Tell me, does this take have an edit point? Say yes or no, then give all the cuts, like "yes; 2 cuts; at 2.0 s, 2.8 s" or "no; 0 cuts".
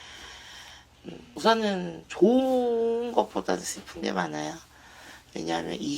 yes; 1 cut; at 1.3 s